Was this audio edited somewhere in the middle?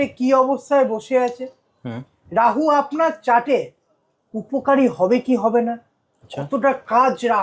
no; 0 cuts

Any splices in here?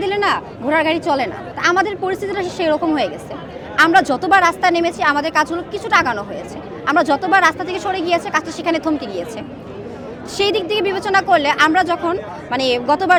no; 0 cuts

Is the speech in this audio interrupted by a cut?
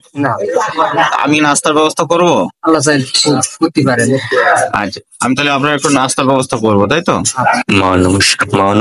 yes; 2 cuts; at 2.5 s, 7.6 s

